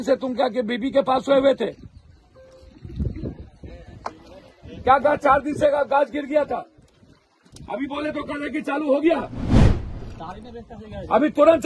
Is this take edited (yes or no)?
no